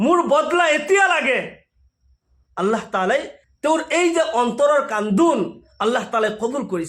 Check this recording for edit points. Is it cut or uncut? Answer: cut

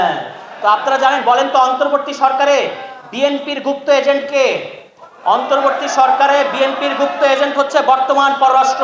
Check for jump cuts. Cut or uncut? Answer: uncut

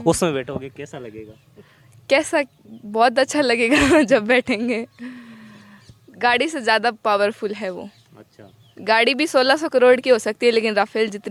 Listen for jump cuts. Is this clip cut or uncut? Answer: uncut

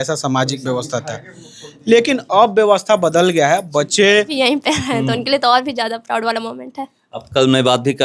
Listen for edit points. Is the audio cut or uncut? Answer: cut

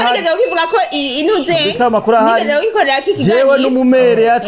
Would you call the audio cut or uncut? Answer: uncut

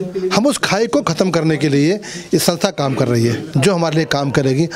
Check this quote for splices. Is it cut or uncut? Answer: cut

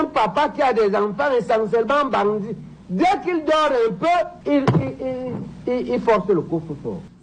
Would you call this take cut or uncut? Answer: uncut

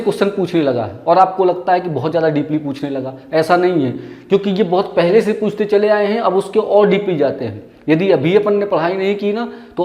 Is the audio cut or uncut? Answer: uncut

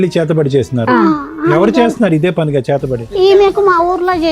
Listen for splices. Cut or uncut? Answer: cut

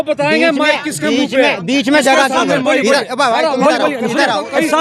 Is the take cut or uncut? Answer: uncut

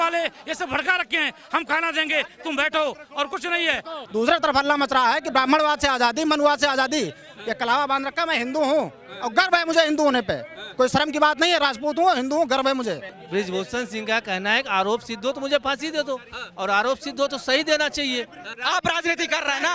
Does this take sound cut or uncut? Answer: cut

